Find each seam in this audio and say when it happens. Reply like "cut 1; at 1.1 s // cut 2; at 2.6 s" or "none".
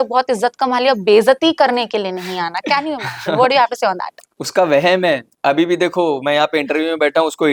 none